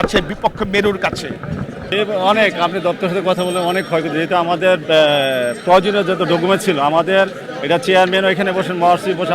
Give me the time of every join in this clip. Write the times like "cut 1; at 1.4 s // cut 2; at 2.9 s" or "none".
cut 1; at 1.9 s

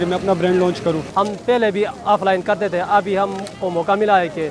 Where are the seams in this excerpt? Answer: cut 1; at 1.0 s

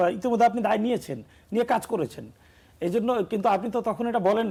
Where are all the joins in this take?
none

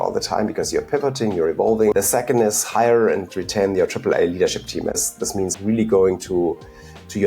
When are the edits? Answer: cut 1; at 1.9 s // cut 2; at 5.3 s

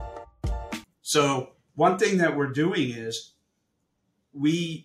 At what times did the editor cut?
cut 1; at 0.9 s

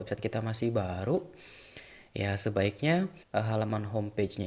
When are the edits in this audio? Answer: cut 1; at 3.2 s

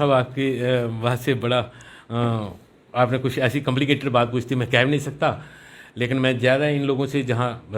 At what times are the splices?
none

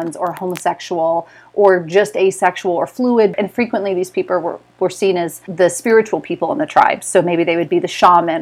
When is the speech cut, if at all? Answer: cut 1; at 3.3 s // cut 2; at 5.4 s

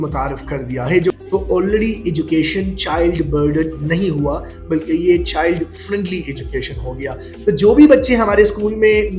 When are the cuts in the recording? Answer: cut 1; at 1.2 s

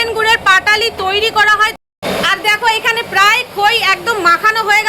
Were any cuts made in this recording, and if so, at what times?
cut 1; at 1.8 s

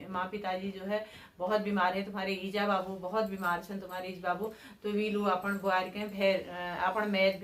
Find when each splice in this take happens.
none

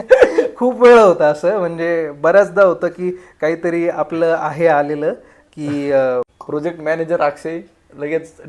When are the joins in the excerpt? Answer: cut 1; at 6.3 s

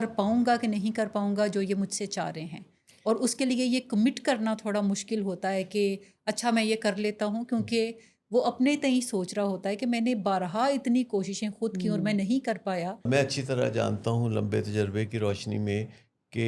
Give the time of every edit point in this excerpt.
cut 1; at 13.0 s

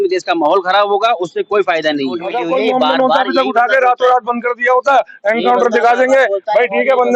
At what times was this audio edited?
cut 1; at 2.3 s

